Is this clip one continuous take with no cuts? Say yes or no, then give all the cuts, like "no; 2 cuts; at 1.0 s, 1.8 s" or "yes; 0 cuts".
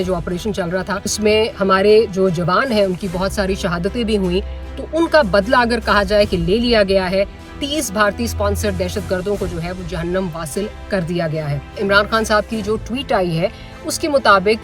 no; 2 cuts; at 1.3 s, 11.8 s